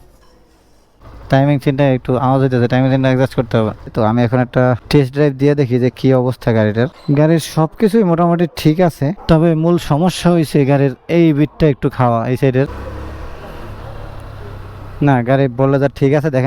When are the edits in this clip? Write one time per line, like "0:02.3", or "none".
0:01.1
0:03.9
0:07.0
0:12.8